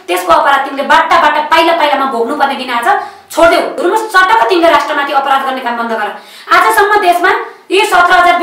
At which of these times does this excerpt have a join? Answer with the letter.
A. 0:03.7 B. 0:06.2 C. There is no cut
A